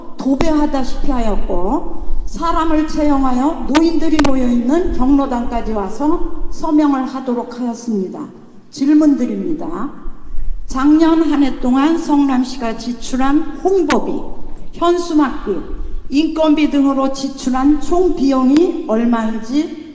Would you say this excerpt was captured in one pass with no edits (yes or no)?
yes